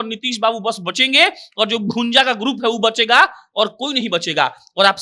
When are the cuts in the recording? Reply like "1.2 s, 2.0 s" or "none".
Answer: none